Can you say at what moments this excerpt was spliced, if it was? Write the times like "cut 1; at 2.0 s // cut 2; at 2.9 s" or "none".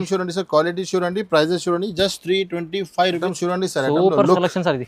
cut 1; at 3.3 s